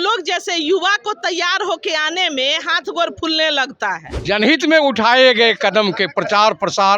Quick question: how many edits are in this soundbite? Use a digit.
1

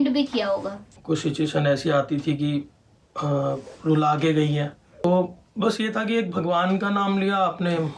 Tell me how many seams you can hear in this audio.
2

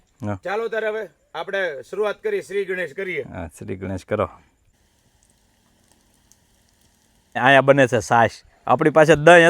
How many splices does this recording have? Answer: 2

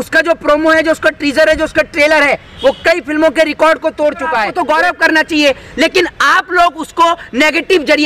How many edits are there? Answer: 1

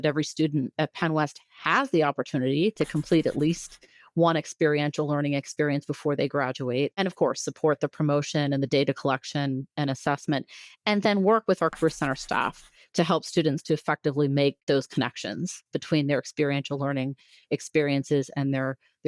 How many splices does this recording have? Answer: 3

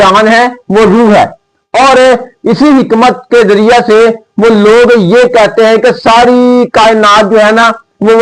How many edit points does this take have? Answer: 0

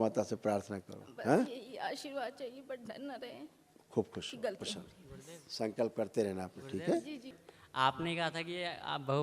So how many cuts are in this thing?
1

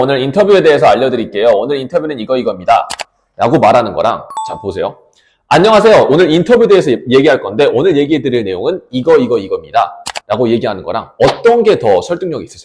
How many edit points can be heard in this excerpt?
0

